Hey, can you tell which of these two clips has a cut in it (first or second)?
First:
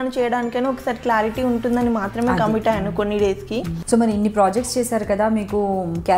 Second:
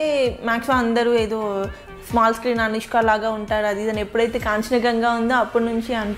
first